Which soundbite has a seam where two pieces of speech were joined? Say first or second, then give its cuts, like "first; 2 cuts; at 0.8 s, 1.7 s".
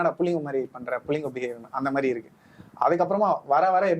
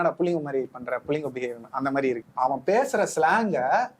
second; 1 cut; at 2.3 s